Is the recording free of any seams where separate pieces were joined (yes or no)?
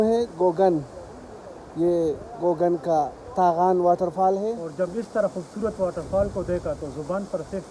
no